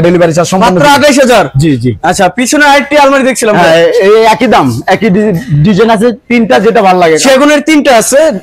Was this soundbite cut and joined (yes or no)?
no